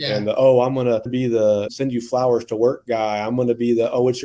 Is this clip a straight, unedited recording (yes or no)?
no